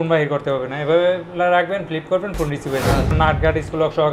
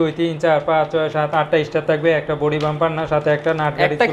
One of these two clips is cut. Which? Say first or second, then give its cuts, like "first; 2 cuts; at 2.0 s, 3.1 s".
first; 1 cut; at 3.1 s